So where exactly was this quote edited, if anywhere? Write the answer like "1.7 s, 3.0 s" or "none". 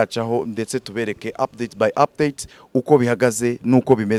none